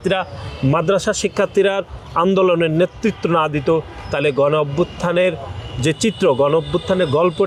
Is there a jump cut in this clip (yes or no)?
no